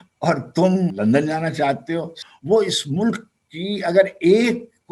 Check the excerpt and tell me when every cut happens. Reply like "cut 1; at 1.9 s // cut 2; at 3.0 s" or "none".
cut 1; at 0.9 s // cut 2; at 2.1 s